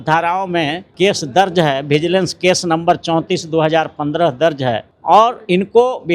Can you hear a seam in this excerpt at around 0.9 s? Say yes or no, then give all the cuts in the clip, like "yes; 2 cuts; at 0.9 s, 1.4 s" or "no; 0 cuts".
yes; 2 cuts; at 0.9 s, 4.9 s